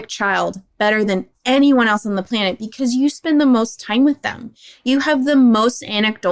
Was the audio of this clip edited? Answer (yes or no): no